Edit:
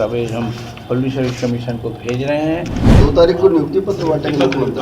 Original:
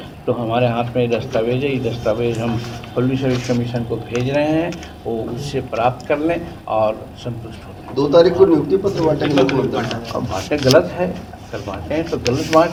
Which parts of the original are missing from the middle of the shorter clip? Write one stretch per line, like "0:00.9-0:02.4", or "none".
0:04.9-0:07.8